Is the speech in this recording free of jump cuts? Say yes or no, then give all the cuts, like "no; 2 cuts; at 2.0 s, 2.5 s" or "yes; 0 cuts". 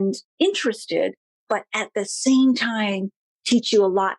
yes; 0 cuts